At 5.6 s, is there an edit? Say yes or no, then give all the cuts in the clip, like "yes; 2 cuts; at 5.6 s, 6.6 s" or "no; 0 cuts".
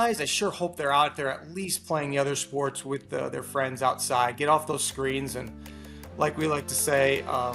no; 0 cuts